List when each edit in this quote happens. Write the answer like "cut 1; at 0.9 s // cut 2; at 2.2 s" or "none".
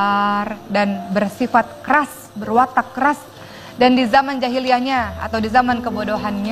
none